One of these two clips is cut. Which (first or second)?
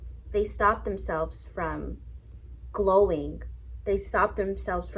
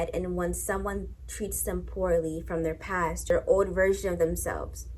second